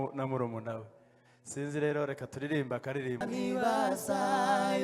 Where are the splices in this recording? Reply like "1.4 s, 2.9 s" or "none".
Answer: 3.2 s